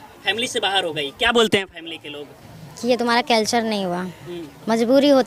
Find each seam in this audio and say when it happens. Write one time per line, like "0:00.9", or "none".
none